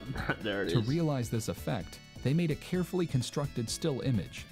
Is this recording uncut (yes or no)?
yes